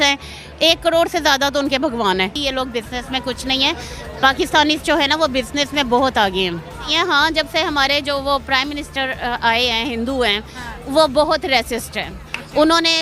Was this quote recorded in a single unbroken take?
no; 2 cuts; at 2.4 s, 6.9 s

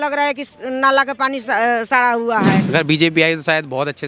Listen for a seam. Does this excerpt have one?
yes; 1 cut; at 2.6 s

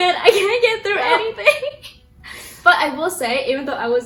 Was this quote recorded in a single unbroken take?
yes; 0 cuts

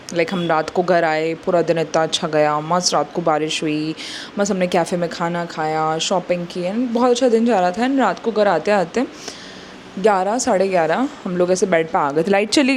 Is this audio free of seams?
yes; 0 cuts

